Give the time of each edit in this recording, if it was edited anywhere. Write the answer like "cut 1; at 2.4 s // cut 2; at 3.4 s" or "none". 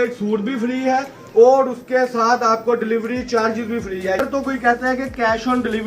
cut 1; at 4.2 s